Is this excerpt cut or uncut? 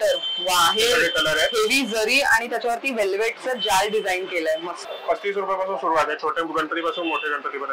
cut